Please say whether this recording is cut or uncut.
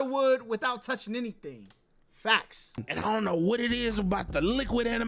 cut